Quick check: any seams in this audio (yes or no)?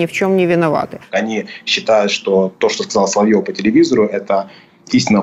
yes